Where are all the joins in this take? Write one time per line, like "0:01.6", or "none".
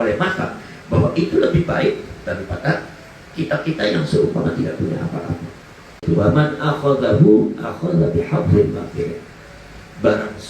0:06.0